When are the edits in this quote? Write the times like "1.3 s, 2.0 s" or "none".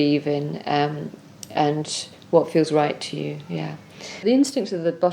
4.2 s